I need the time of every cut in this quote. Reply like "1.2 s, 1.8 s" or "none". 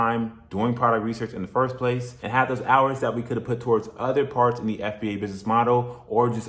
2.1 s